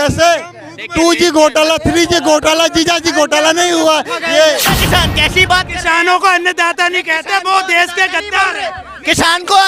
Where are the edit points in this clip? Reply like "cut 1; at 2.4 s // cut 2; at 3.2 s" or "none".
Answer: cut 1; at 4.7 s

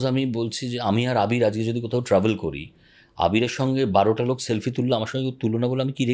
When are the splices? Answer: none

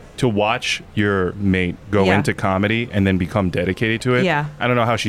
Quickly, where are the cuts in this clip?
none

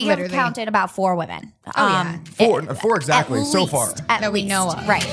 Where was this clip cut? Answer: none

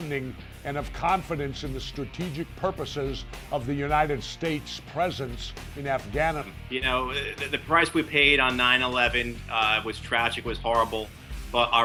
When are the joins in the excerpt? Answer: none

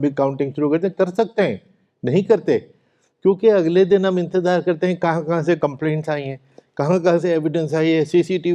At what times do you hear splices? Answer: none

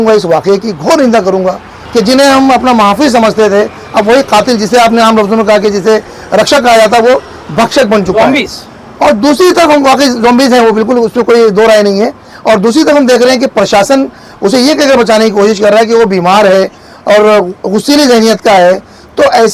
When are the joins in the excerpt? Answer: cut 1; at 1.7 s

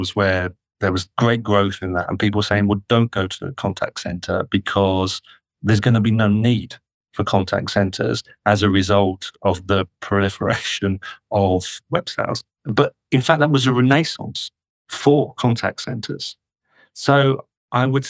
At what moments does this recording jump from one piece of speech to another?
none

